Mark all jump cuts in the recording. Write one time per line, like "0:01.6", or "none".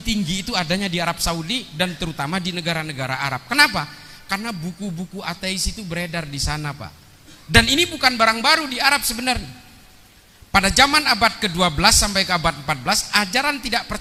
none